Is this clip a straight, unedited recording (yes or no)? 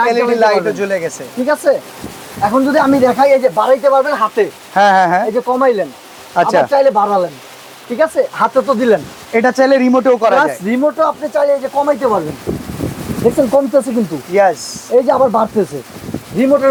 yes